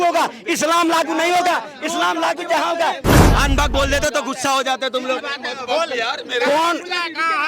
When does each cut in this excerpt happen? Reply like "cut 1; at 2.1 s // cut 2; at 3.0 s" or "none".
cut 1; at 3.1 s